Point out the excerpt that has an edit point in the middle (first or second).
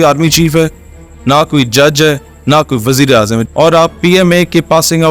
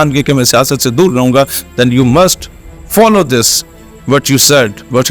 first